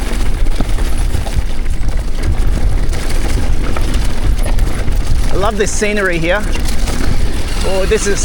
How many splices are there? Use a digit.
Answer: 0